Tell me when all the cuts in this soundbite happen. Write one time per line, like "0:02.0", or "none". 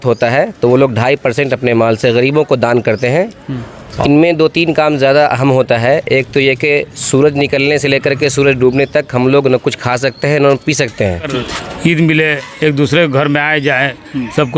0:03.9
0:11.4

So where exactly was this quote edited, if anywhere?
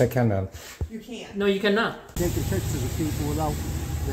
0:02.1

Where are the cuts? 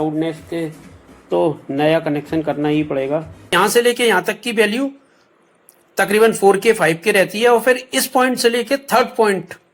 0:03.4

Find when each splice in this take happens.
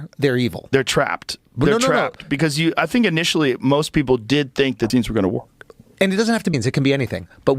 0:04.9
0:06.5

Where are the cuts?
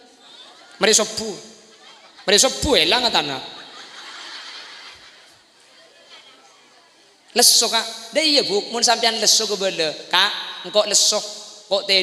none

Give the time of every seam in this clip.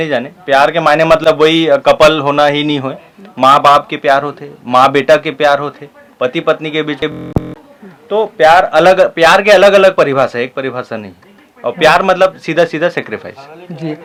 none

